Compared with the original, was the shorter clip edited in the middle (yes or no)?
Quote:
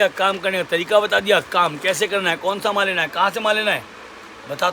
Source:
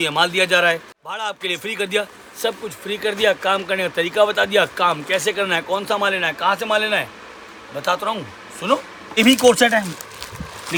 no